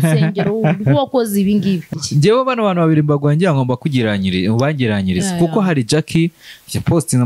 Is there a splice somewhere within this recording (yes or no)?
yes